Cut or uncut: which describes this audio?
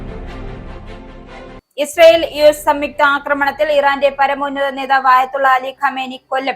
cut